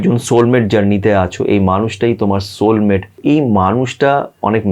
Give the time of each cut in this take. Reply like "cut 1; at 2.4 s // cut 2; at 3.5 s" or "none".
cut 1; at 3.2 s